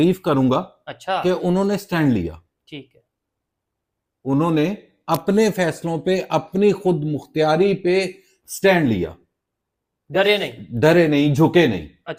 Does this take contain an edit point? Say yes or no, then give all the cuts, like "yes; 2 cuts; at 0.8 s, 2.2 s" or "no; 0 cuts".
no; 0 cuts